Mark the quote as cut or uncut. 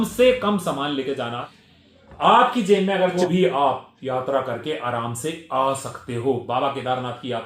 cut